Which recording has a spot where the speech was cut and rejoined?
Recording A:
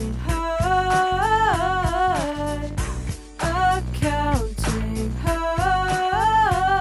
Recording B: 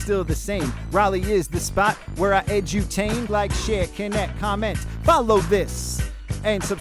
B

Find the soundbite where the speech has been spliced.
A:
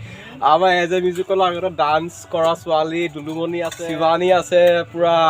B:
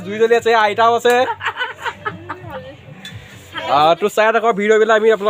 A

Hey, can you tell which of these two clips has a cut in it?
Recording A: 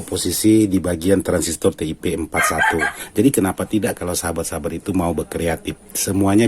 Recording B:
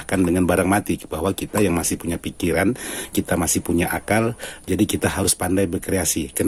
A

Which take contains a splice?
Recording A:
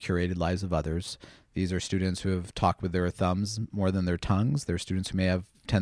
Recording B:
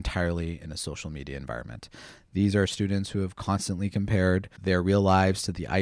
B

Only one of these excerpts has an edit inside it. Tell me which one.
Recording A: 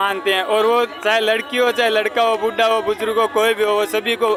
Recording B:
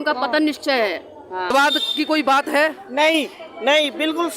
B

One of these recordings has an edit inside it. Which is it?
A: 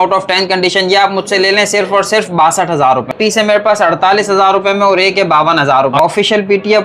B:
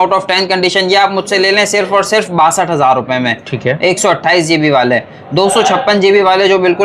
A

